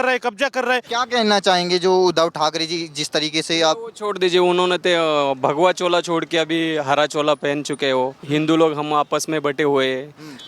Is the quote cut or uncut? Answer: cut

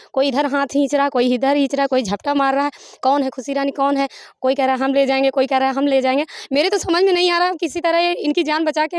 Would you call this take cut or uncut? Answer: uncut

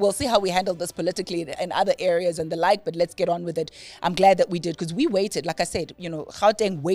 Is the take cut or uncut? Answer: uncut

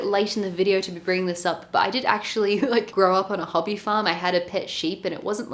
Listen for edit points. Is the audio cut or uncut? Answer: uncut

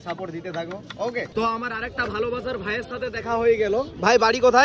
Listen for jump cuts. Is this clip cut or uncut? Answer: cut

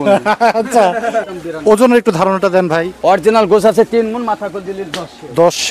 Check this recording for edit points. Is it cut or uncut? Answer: cut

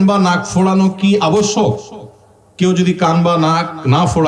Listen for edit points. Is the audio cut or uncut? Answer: uncut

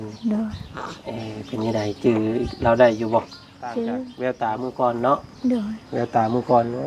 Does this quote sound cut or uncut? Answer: cut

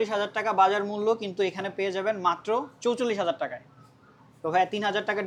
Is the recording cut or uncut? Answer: uncut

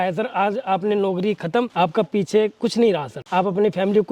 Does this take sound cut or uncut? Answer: cut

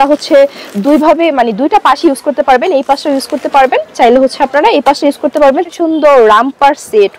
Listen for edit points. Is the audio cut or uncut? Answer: cut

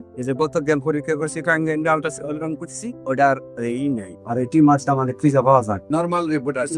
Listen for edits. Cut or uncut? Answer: uncut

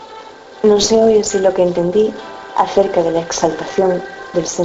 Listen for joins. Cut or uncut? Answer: uncut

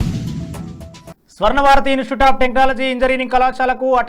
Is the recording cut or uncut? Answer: cut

